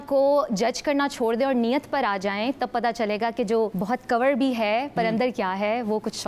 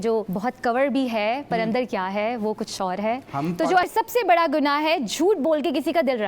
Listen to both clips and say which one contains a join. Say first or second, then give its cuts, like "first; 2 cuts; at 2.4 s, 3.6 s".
second; 1 cut; at 3.8 s